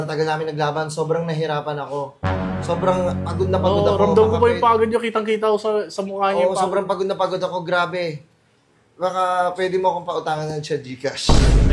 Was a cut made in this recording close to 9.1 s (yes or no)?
no